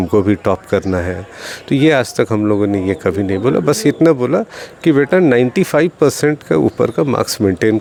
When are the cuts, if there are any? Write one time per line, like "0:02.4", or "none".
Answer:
none